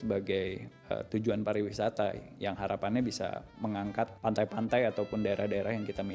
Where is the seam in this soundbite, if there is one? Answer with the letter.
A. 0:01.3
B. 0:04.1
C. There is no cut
B